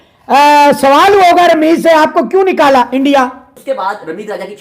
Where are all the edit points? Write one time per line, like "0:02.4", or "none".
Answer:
0:03.5